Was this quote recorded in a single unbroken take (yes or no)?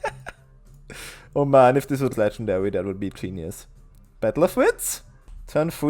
no